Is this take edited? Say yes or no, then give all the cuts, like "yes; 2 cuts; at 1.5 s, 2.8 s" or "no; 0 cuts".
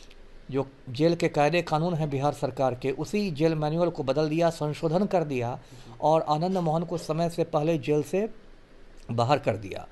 no; 0 cuts